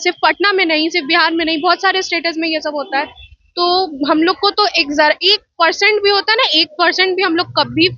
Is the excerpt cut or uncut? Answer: uncut